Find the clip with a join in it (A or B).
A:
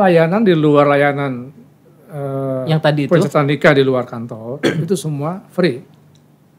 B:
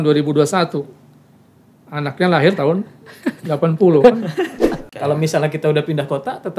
B